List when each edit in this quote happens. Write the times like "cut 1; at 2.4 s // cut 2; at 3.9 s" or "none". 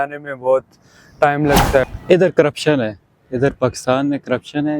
cut 1; at 1.8 s